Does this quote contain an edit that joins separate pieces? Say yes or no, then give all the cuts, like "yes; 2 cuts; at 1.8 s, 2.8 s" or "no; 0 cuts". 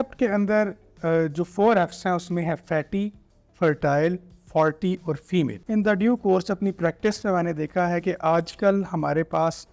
yes; 1 cut; at 5.6 s